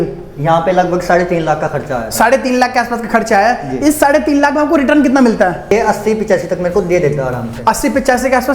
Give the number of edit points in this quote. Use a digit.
1